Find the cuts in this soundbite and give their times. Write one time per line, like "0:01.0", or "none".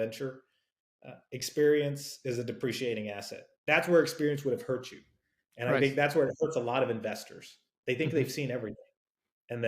0:03.5